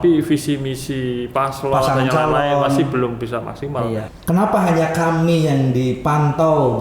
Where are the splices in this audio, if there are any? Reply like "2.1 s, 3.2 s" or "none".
4.1 s